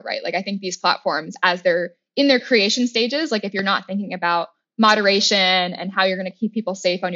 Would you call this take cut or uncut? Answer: cut